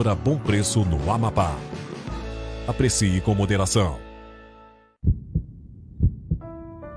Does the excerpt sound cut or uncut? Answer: cut